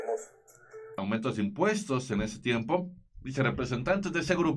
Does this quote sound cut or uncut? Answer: cut